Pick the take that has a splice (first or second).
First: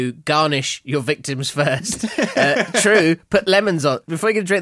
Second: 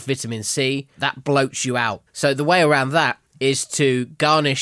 second